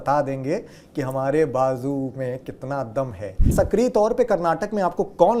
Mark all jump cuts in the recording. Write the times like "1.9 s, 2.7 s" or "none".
3.5 s